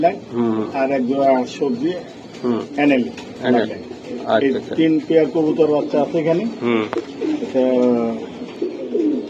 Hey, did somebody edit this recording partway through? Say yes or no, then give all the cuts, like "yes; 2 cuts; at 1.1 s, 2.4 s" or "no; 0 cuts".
no; 0 cuts